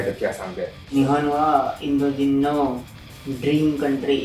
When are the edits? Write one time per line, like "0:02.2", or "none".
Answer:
0:00.9